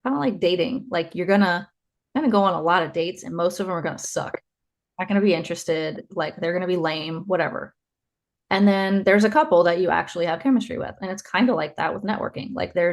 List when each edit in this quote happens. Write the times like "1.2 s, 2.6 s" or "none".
none